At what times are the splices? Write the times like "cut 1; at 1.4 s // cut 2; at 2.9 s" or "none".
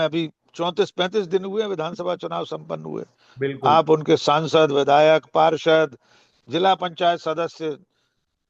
none